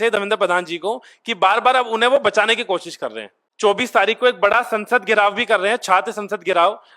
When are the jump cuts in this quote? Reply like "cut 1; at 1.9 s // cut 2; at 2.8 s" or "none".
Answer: cut 1; at 3.4 s